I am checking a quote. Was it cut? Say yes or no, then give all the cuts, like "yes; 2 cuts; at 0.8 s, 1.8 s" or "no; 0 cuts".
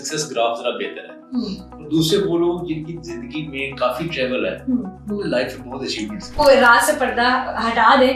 yes; 1 cut; at 6.4 s